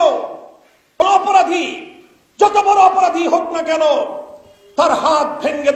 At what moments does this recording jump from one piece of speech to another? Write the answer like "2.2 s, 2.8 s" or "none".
1.0 s